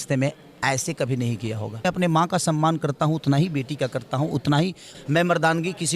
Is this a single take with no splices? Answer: no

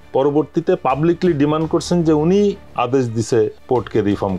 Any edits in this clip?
no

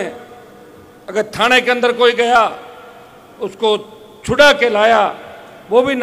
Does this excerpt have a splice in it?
no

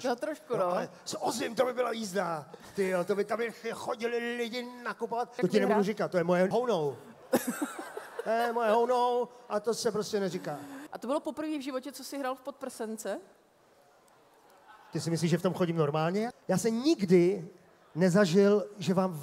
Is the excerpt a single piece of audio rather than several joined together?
no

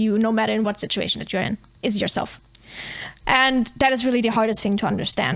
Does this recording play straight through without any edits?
yes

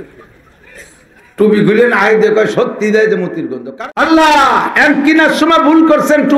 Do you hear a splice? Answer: yes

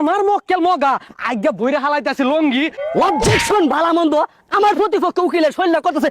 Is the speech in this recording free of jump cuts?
no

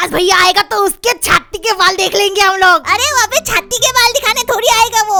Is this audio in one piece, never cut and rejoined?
yes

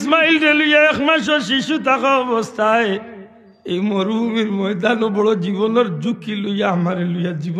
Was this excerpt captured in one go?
yes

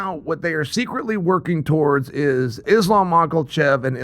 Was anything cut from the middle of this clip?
yes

